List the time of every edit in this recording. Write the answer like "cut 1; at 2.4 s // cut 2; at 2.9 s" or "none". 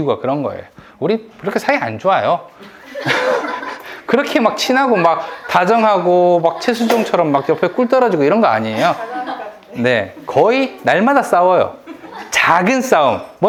none